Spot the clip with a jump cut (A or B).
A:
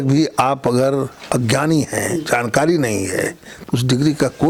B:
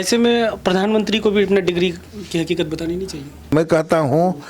B